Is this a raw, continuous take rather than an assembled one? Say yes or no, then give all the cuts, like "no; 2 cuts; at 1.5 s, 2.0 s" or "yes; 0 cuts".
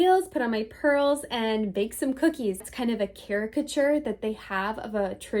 no; 1 cut; at 2.7 s